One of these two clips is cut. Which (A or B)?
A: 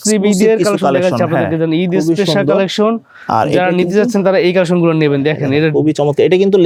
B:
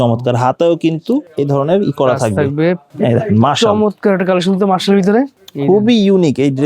B